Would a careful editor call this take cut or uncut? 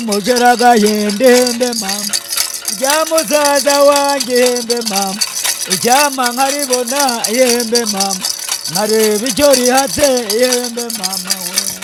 uncut